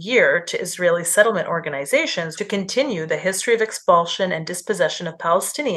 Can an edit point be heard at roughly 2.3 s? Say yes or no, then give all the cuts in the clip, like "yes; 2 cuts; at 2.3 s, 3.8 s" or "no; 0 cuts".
yes; 1 cut; at 2.3 s